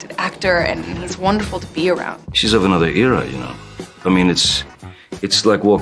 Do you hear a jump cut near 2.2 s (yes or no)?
yes